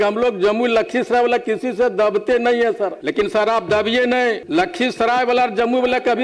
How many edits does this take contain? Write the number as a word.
two